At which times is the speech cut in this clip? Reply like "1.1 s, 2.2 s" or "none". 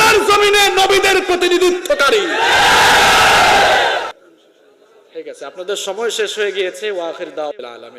4.1 s